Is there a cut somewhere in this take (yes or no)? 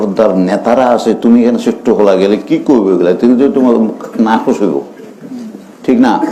no